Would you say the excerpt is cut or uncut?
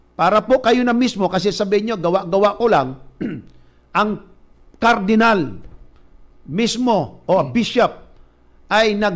cut